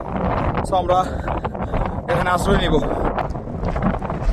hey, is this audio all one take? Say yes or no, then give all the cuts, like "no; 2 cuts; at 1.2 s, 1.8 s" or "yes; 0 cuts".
no; 1 cut; at 3.3 s